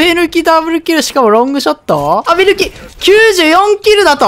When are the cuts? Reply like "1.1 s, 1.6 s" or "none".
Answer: 2.3 s